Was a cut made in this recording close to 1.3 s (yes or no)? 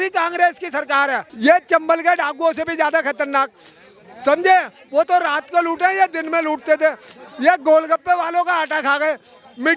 yes